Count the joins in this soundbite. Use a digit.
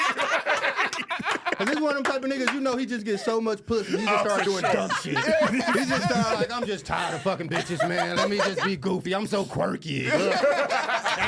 0